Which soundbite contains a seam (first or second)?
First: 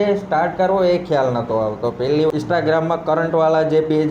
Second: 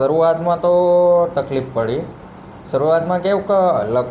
first